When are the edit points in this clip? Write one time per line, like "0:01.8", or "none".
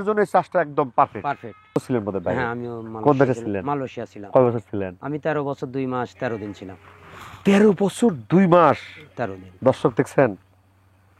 0:01.8